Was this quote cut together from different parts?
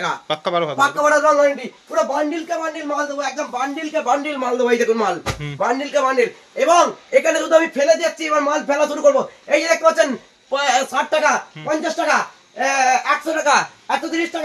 no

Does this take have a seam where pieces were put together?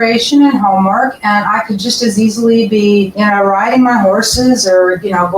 yes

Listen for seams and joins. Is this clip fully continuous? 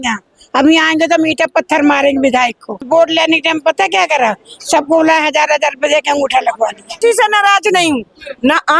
no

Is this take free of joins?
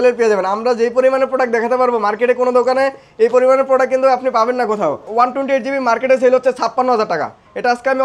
no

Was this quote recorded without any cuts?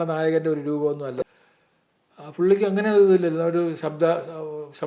no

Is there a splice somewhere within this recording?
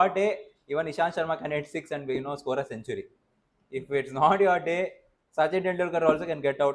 no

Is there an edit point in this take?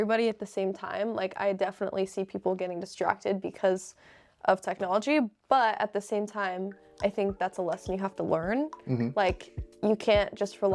no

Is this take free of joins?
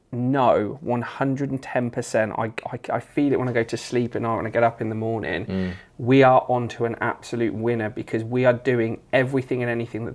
yes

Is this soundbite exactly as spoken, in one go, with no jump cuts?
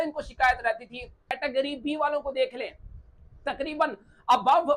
no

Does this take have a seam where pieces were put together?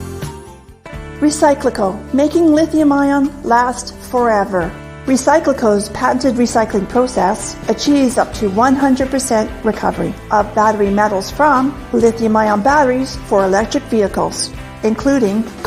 yes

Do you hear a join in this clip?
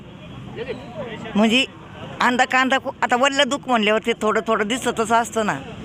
no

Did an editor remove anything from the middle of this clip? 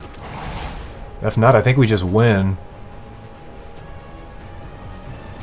no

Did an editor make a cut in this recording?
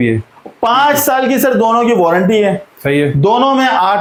no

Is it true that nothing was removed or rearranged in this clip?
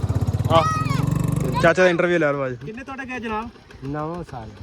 no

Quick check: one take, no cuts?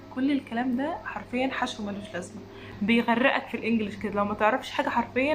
no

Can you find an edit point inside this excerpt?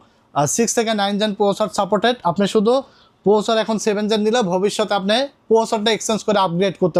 no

